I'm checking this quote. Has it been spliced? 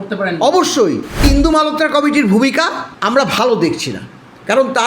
yes; 2 cuts; at 1.2 s, 2.9 s

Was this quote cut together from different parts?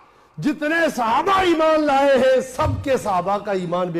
no; 0 cuts

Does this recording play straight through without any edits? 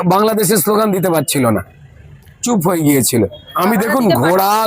no; 1 cut; at 3.5 s

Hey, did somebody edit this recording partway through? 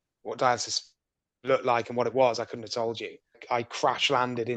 yes; 1 cut; at 3.4 s

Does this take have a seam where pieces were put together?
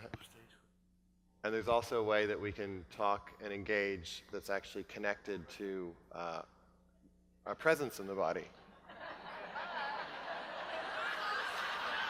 no; 0 cuts

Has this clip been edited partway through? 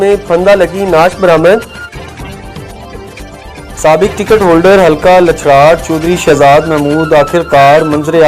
yes; 2 cuts; at 1.7 s, 3.7 s

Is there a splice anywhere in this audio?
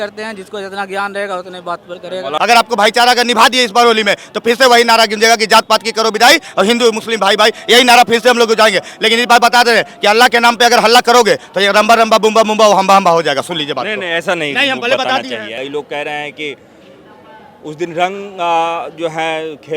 yes; 2 cuts; at 2.3 s, 15.5 s

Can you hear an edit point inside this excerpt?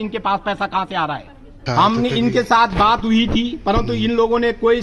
yes; 1 cut; at 1.6 s

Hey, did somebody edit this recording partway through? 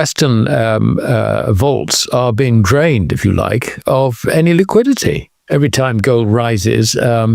yes; 1 cut; at 5.3 s

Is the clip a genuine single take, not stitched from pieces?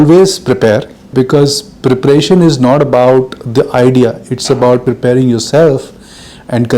no; 2 cuts; at 1.1 s, 4.8 s

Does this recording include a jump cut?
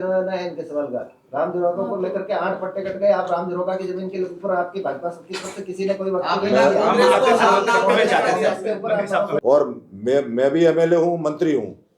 yes; 1 cut; at 9.4 s

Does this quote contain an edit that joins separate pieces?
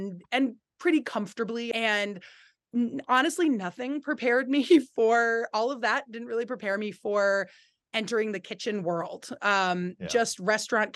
yes; 1 cut; at 1.7 s

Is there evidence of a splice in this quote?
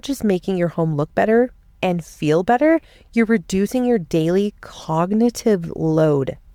no; 0 cuts

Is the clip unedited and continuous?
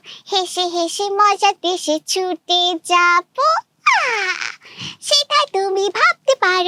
yes; 0 cuts

